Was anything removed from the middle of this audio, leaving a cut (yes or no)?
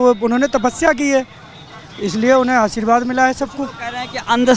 no